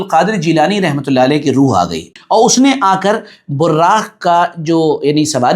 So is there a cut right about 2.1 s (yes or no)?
yes